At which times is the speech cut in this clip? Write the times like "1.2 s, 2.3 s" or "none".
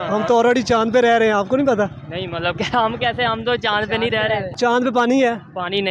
4.5 s